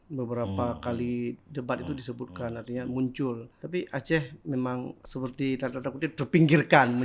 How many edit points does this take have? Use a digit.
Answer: 2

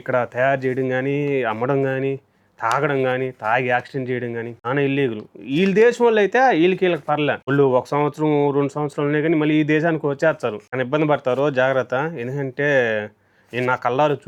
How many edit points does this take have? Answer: 0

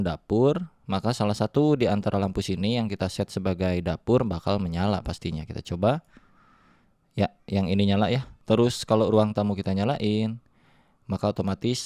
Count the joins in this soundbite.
1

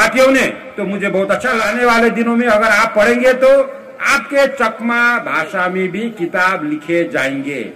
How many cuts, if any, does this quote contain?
1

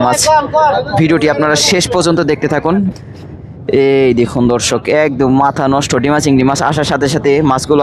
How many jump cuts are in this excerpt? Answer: 1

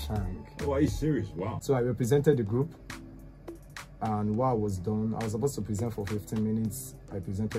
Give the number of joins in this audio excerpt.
1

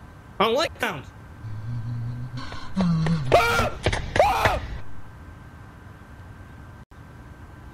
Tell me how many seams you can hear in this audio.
1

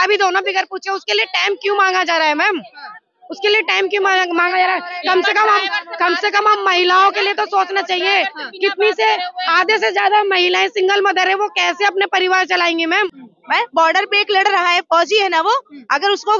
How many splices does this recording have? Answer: 1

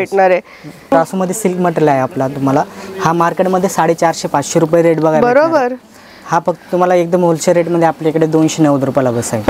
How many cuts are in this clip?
1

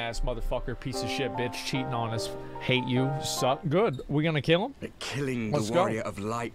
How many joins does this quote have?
1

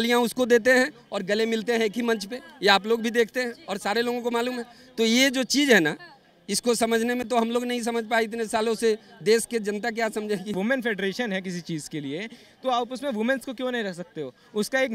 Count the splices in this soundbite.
1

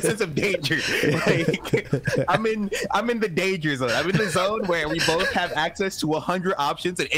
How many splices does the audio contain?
0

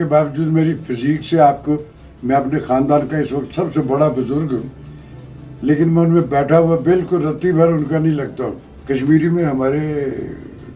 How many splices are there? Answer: 0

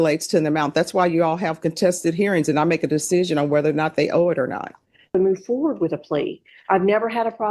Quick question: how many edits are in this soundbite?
1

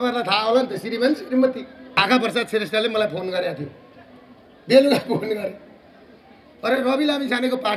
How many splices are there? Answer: 1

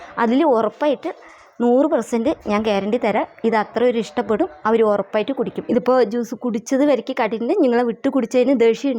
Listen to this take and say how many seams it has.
1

